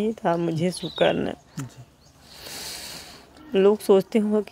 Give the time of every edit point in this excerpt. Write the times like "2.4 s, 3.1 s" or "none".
none